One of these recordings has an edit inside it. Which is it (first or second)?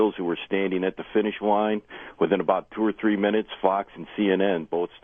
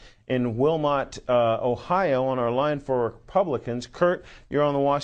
second